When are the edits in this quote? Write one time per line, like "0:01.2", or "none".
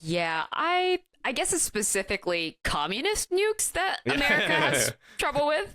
0:01.1